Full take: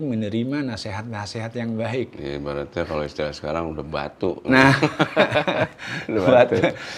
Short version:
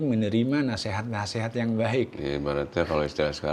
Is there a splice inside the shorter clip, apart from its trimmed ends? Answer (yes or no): no